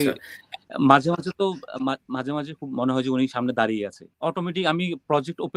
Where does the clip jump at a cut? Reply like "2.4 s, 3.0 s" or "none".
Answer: 4.1 s